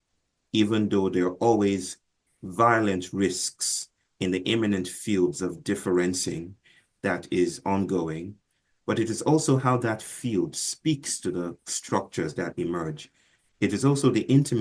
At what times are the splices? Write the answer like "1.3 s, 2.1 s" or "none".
8.8 s